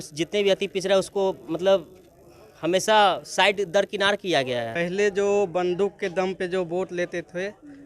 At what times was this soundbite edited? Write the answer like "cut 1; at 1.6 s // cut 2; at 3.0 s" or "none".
cut 1; at 4.7 s